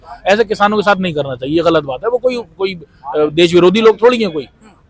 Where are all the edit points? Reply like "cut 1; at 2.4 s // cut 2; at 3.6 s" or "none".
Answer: none